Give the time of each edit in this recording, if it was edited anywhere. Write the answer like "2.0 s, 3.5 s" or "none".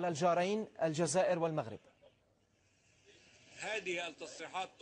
2.3 s

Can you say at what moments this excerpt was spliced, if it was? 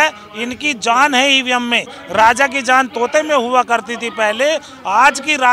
none

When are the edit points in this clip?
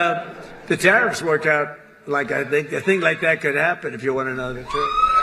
none

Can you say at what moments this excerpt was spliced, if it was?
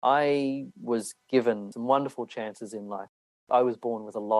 1.7 s, 3.5 s

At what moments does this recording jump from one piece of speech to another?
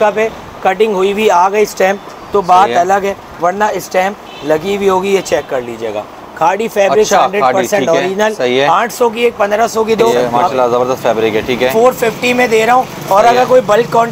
10.1 s

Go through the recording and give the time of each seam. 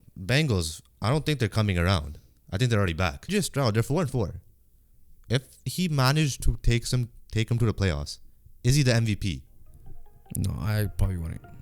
3.3 s

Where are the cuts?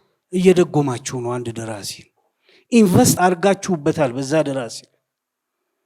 3.2 s

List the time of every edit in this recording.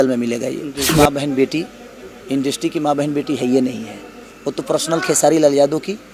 0.9 s

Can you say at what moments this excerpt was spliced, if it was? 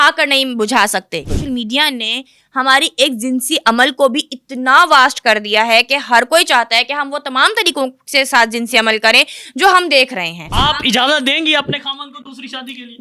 1.3 s, 10.5 s

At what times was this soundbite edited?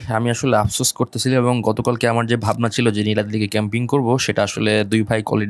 none

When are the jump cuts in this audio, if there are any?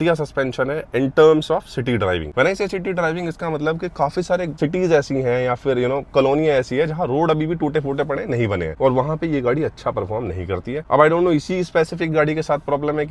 none

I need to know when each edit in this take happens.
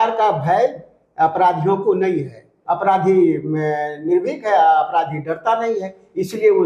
2.5 s

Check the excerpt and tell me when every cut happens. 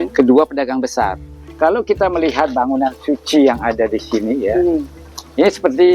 1.3 s

